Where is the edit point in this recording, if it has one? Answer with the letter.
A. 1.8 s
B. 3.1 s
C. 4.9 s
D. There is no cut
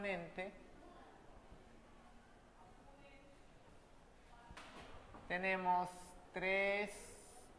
B